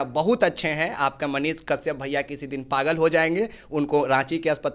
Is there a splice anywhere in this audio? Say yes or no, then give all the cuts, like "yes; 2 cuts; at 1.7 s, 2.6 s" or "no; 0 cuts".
no; 0 cuts